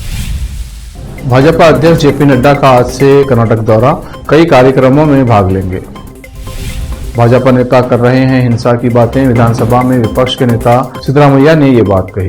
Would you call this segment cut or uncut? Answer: cut